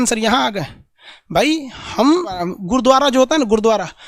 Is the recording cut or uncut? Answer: cut